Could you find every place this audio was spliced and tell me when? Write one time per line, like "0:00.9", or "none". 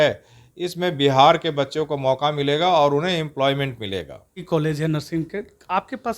0:04.4